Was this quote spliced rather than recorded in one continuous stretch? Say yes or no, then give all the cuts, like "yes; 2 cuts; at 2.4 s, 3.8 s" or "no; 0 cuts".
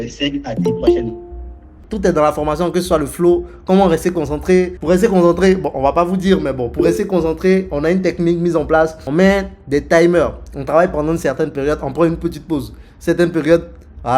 yes; 3 cuts; at 1.8 s, 4.8 s, 9.0 s